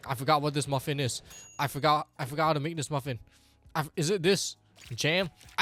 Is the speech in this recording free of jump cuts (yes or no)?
yes